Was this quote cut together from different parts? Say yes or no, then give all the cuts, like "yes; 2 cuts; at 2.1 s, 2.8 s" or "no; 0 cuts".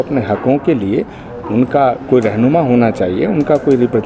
no; 0 cuts